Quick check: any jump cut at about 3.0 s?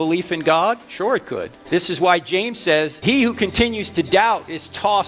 yes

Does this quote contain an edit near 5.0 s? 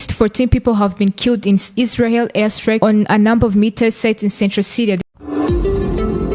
yes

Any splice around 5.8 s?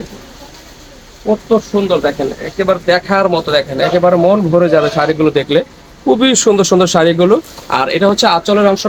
no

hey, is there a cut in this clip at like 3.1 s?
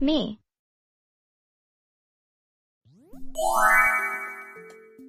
no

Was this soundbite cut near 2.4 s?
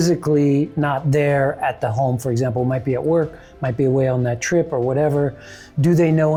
no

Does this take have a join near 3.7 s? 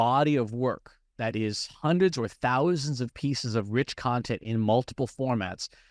no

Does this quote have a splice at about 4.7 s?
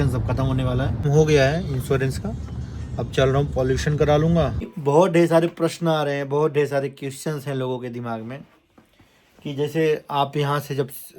yes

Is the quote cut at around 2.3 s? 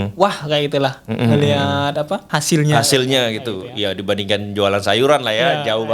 yes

